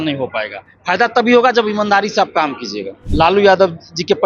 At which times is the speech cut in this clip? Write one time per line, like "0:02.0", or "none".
0:03.0